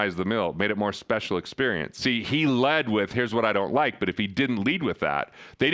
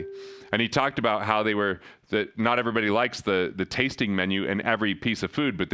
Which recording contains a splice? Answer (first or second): first